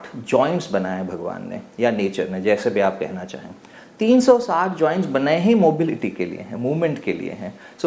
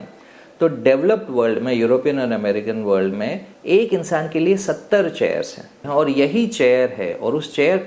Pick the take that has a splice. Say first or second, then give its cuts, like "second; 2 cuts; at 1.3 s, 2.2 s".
second; 1 cut; at 5.8 s